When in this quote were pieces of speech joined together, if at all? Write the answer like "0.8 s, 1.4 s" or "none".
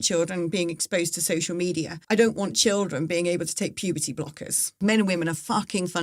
2.0 s, 4.8 s